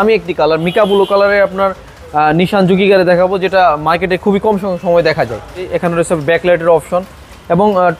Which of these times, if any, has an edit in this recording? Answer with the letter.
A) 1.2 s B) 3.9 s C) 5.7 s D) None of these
C